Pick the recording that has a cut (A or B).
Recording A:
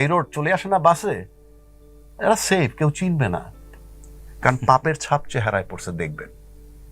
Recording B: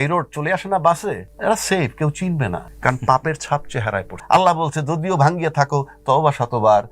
B